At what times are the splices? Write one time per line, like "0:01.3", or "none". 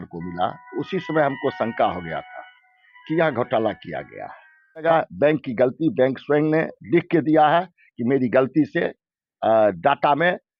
0:04.8